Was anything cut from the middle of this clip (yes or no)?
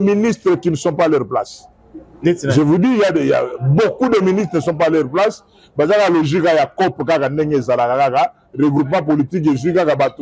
no